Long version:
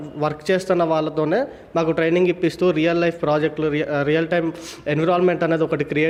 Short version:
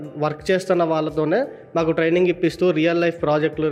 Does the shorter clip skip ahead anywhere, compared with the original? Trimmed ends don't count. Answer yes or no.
no